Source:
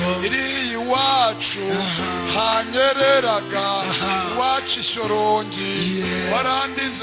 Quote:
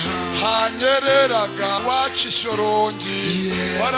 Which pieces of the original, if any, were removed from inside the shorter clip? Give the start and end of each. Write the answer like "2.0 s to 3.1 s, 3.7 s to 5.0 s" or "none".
3.7 s to 4.3 s